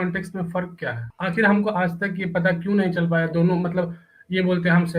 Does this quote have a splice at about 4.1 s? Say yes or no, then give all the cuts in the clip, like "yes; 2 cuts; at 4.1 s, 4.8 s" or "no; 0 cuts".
no; 1 cut; at 1.1 s